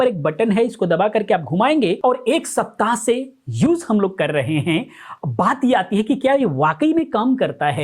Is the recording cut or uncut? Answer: cut